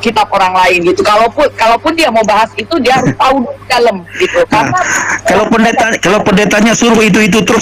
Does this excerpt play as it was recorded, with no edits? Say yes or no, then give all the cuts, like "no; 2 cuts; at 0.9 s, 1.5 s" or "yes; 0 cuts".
yes; 0 cuts